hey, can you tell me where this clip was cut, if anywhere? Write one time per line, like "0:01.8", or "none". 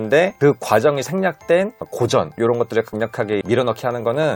none